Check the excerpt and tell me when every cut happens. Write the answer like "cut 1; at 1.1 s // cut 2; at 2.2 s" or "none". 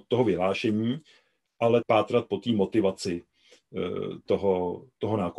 cut 1; at 1.8 s